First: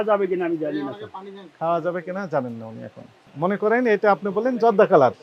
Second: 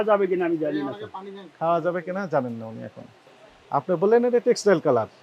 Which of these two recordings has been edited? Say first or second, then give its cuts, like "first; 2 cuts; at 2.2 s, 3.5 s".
second; 1 cut; at 3.3 s